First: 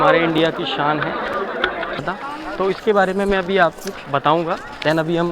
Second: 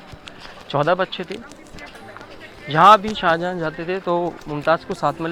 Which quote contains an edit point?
first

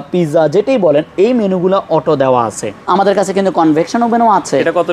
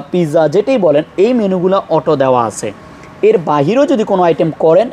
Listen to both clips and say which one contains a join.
first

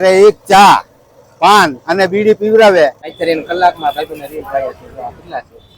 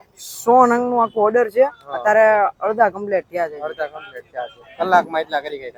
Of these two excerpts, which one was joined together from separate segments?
first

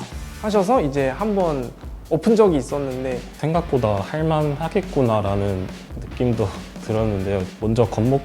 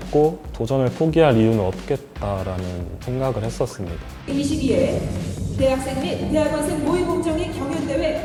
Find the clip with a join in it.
first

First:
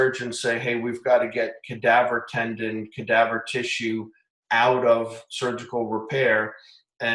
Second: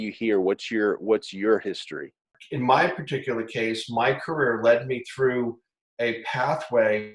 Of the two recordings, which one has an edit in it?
second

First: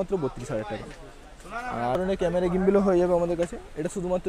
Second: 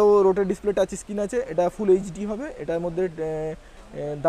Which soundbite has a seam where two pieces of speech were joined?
first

